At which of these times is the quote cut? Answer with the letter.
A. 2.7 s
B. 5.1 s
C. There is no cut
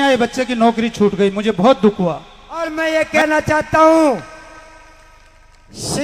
A